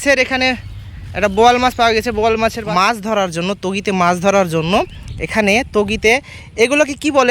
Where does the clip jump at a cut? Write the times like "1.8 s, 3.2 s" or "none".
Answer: 2.6 s